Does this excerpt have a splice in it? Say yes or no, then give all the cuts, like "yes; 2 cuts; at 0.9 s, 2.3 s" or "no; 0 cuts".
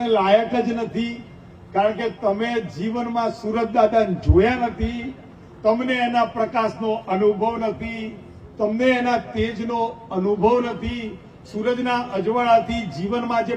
no; 0 cuts